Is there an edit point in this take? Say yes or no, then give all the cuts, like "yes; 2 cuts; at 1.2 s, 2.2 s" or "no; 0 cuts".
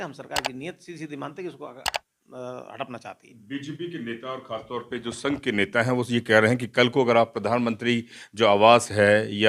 no; 0 cuts